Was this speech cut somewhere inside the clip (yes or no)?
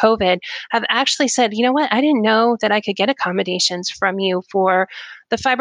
no